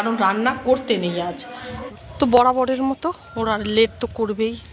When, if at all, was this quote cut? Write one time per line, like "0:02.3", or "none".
0:01.9